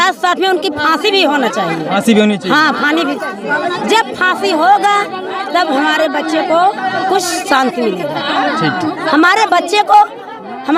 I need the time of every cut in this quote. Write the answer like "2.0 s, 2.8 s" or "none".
none